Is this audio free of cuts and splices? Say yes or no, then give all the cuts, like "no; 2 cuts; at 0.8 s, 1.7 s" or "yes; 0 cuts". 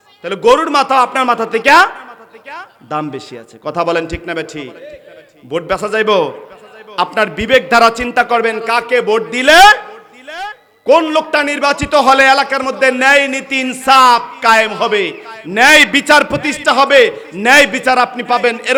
yes; 0 cuts